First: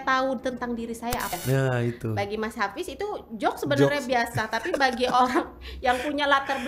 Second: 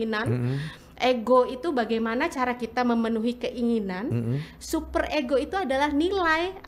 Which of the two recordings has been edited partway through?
first; 1 cut; at 1.4 s

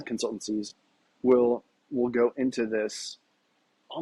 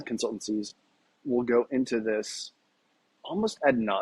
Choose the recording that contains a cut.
second; 1 cut; at 1.1 s

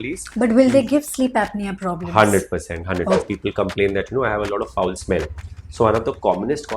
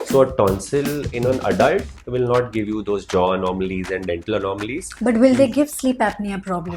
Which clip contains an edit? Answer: first; 1 cut; at 3.3 s

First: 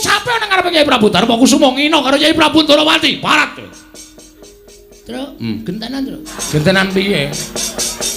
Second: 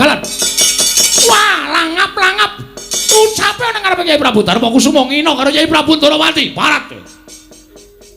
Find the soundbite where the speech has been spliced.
first; 1 cut; at 6.3 s

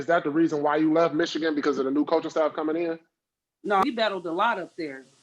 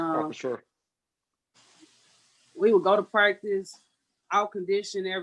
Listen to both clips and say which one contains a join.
first; 1 cut; at 3.8 s

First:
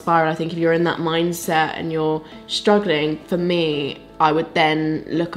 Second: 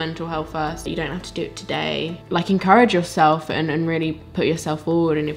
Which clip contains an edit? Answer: second; 2 cuts; at 0.8 s, 2.3 s

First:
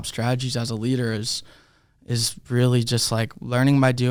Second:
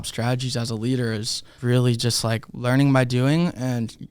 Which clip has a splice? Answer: second; 1 cut; at 1.5 s

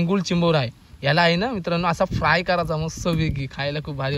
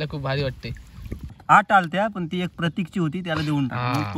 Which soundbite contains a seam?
second; 1 cut; at 1.4 s

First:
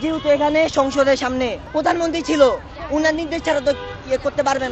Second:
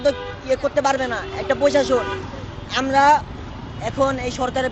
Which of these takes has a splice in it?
first; 1 cut; at 1.6 s

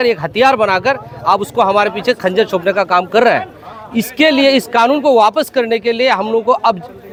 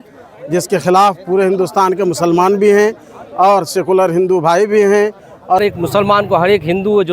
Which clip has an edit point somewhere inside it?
second; 1 cut; at 5.6 s

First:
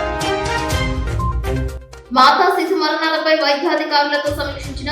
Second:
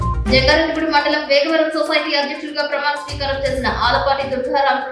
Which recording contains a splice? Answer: first; 1 cut; at 1.7 s

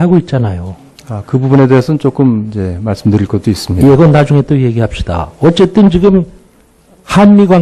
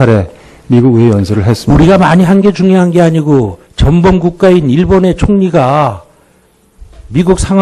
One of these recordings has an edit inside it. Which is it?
first; 1 cut; at 5.8 s

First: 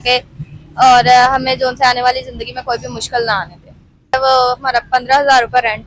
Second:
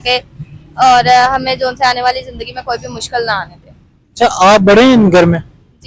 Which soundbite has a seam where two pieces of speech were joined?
first; 1 cut; at 4.1 s

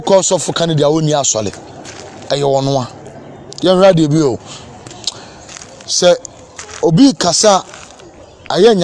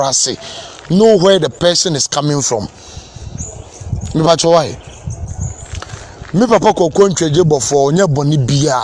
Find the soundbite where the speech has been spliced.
first; 1 cut; at 5.5 s

